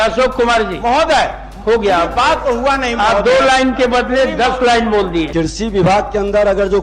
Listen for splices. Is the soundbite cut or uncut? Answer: cut